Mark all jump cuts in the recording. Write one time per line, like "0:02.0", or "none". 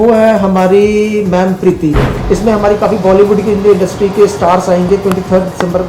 0:02.1